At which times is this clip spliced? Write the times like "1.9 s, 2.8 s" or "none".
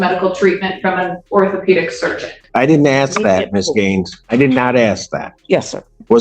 2.4 s